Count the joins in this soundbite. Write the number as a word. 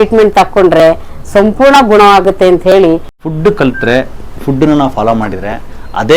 one